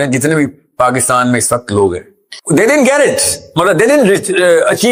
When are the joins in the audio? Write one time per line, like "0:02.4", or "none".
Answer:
none